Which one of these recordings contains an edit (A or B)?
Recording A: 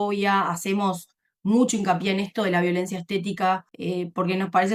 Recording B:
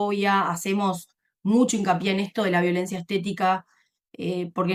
A